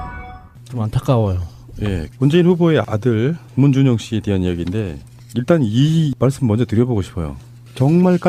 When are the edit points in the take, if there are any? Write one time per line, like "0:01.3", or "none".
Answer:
none